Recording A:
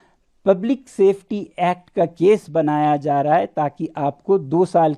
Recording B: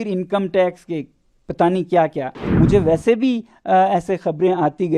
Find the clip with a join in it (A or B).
B